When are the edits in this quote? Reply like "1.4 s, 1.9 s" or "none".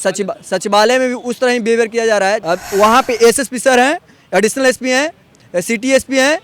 2.4 s